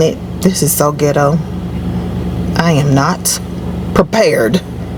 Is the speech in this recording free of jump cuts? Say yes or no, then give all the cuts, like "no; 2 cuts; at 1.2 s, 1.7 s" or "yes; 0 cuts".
yes; 0 cuts